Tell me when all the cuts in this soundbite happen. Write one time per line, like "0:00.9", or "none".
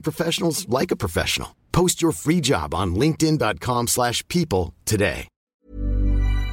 0:05.5

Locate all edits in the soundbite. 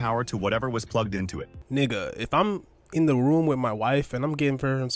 0:01.5

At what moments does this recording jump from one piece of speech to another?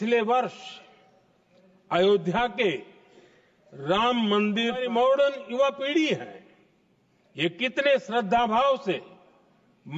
0:04.8

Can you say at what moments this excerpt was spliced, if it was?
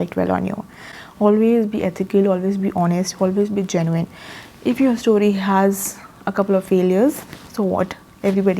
none

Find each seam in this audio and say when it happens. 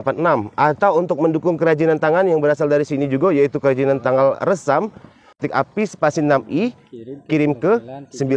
0:05.4

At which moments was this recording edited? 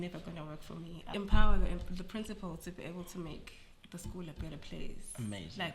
0:01.1

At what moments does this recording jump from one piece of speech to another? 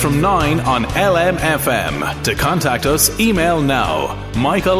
none

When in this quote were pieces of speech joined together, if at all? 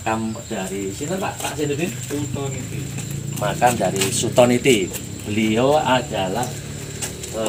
none

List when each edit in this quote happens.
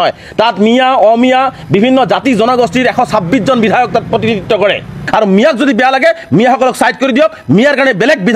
0:05.0

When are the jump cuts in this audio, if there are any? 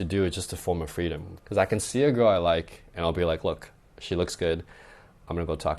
none

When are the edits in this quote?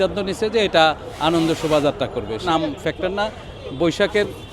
0:02.5

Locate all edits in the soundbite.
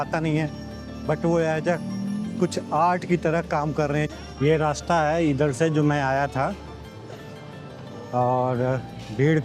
0:04.1

